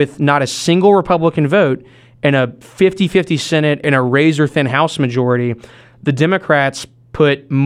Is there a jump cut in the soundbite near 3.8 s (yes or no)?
yes